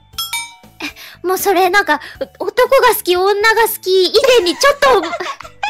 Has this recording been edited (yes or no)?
no